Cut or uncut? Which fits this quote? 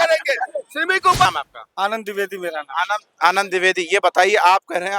cut